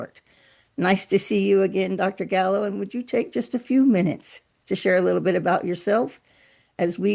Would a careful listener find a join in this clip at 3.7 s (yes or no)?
no